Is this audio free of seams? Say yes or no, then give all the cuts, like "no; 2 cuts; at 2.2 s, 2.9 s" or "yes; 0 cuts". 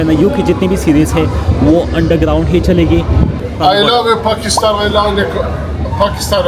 no; 1 cut; at 3.4 s